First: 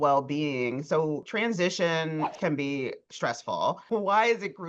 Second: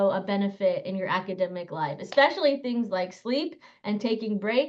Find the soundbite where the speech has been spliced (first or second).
first